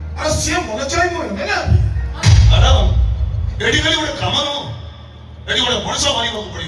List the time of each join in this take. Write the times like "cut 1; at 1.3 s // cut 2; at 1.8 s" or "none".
cut 1; at 2.1 s